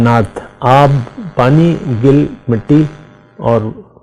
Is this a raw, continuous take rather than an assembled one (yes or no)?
yes